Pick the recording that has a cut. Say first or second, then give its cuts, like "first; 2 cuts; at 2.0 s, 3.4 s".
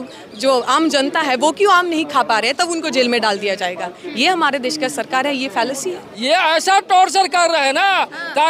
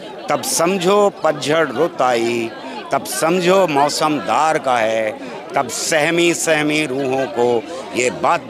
first; 1 cut; at 6.0 s